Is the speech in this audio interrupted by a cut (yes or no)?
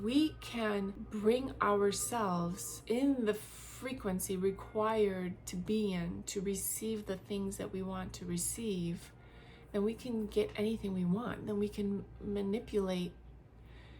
yes